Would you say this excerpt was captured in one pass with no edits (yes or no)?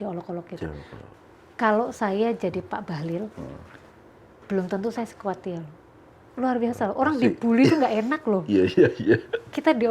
no